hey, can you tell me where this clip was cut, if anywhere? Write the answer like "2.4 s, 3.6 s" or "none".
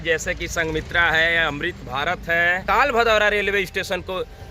2.6 s